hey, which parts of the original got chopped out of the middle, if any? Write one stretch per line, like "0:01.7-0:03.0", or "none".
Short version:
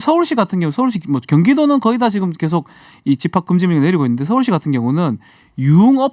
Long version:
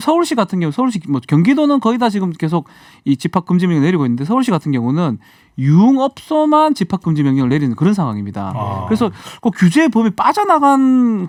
none